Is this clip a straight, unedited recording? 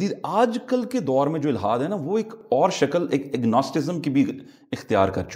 yes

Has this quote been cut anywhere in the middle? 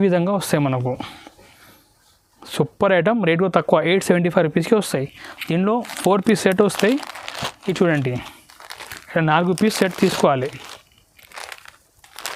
no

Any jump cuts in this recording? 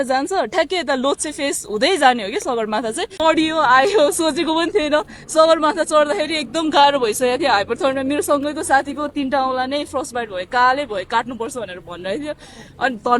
yes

